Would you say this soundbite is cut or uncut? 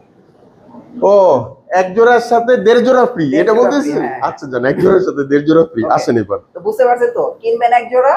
uncut